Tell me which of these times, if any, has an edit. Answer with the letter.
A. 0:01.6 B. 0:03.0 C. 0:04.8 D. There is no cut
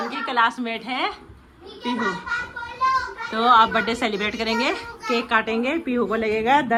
D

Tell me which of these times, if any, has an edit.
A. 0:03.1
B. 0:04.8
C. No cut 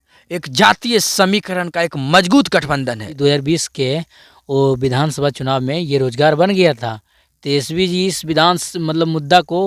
A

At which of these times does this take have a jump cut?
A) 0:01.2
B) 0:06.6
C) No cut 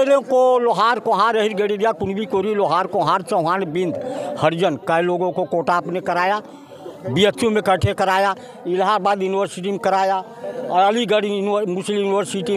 C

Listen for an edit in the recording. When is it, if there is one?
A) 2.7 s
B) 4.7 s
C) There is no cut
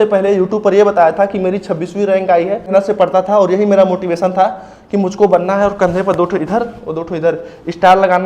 A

